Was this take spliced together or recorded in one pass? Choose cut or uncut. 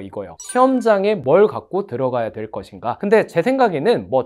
uncut